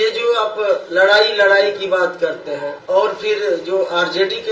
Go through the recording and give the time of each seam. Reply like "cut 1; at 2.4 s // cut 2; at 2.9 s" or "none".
cut 1; at 2.8 s